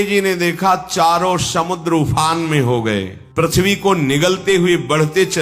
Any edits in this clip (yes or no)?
yes